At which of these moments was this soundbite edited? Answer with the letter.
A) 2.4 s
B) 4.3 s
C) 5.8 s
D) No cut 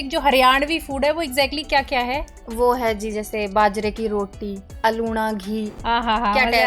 C